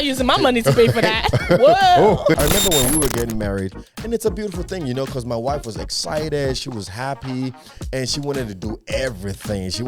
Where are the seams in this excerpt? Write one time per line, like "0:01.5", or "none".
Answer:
0:02.4